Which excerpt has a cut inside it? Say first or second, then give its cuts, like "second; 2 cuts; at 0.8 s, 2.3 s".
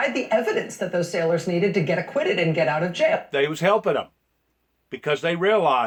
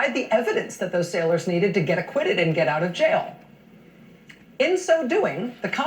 second; 1 cut; at 3.2 s